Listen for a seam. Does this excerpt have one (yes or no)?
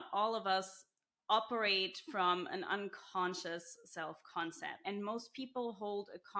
yes